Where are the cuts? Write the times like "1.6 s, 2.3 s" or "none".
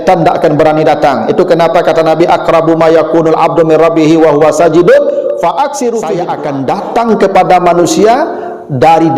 6.3 s